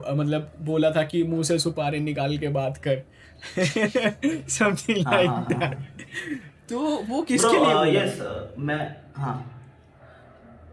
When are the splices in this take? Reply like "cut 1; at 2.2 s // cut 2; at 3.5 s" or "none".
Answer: none